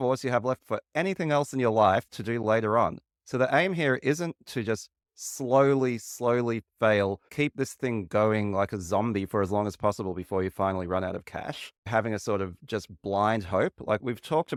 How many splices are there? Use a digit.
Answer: 0